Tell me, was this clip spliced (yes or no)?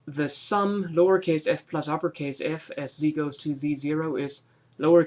no